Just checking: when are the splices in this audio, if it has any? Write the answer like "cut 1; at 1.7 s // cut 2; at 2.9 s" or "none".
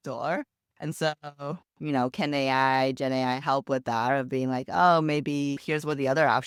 none